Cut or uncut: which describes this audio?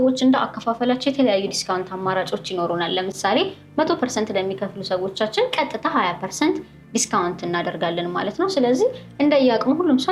uncut